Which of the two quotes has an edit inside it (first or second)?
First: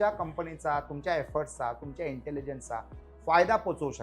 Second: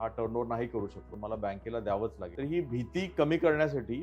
second